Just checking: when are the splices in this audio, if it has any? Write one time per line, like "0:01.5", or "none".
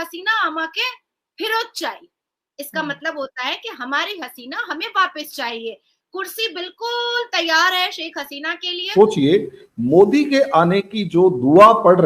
0:08.8